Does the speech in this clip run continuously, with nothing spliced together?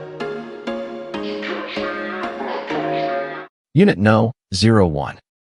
no; 1 cut; at 3.4 s

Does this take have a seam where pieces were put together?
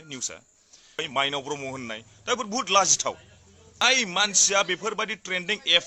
yes; 2 cuts; at 1.0 s, 3.8 s

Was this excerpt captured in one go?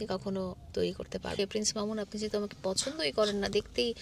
no; 1 cut; at 1.4 s

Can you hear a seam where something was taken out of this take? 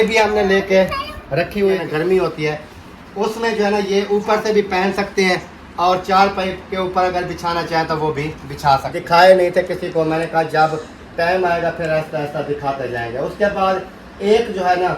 yes; 2 cuts; at 1.8 s, 8.9 s

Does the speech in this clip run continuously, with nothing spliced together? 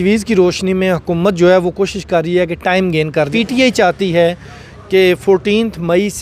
no; 1 cut; at 3.3 s

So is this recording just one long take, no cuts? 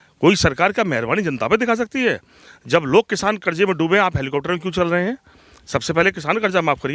yes; 0 cuts

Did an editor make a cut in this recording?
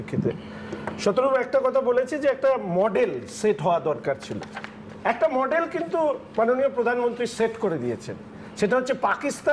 no; 0 cuts

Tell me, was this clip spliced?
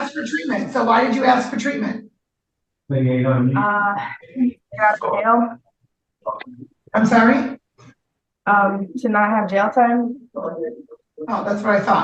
no; 0 cuts

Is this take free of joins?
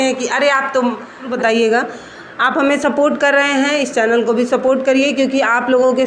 no; 1 cut; at 1.3 s

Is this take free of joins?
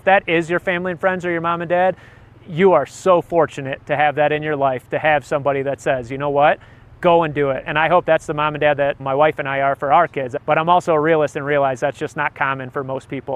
no; 2 cuts; at 9.0 s, 10.3 s

